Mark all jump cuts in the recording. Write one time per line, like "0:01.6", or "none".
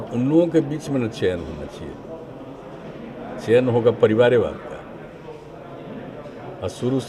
none

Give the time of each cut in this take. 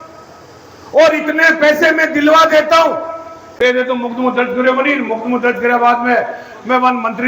0:03.4

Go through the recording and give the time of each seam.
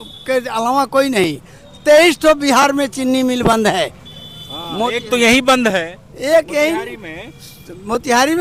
none

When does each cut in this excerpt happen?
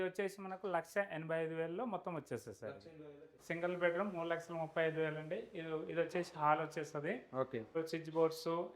0:03.4
0:07.7

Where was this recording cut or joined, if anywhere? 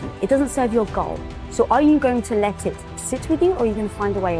none

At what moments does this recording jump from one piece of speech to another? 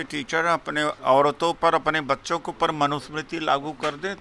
0:01.0

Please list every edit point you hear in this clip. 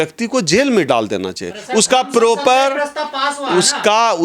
none

